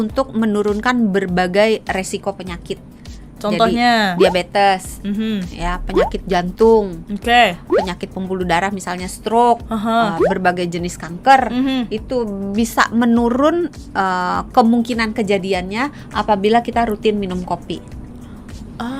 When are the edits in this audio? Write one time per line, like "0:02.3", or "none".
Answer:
none